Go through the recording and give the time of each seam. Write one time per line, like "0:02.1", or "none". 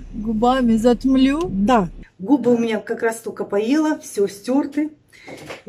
0:02.0